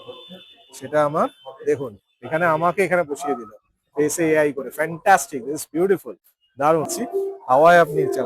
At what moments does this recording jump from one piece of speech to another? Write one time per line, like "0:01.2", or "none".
0:06.9